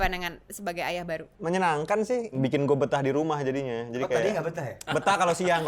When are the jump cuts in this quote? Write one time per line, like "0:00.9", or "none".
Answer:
0:01.3
0:02.3
0:04.8